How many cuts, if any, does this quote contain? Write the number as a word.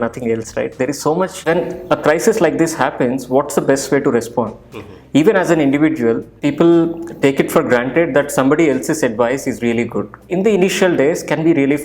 three